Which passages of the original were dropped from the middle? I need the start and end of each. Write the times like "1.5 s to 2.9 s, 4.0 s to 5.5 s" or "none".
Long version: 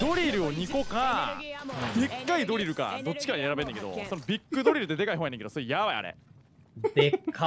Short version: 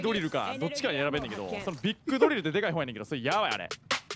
none